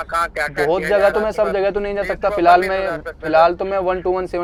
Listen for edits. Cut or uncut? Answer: uncut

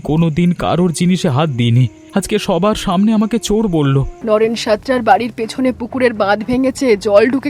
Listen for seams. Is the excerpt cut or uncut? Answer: cut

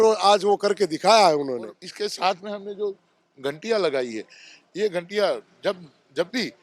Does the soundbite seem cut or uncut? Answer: cut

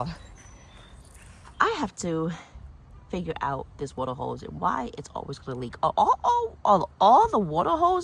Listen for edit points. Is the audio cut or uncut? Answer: uncut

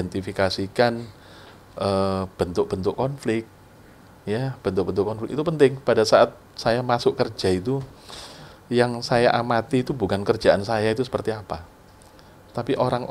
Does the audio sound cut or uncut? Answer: uncut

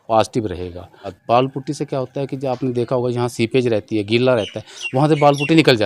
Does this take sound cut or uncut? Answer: cut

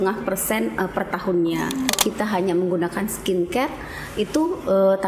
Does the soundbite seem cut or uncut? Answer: cut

